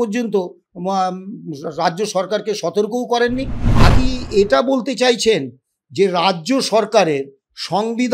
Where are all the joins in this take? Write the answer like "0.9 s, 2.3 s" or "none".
3.9 s

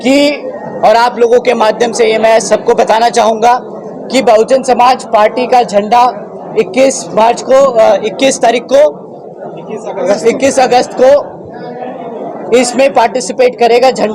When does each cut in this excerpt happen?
none

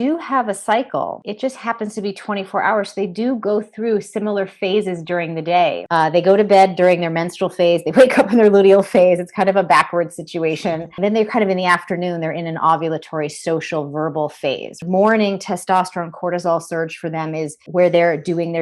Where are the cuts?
1.2 s, 5.8 s, 10.9 s, 14.8 s, 17.6 s

